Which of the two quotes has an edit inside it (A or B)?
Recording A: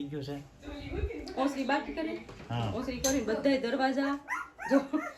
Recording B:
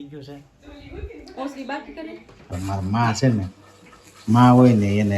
B